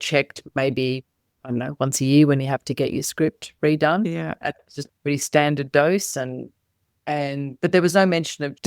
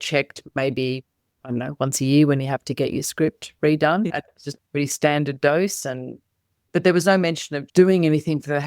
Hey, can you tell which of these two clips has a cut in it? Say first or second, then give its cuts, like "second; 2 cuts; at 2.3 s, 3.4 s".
second; 2 cuts; at 4.1 s, 6.6 s